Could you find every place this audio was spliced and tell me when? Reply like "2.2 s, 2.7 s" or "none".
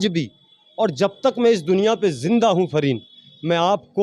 none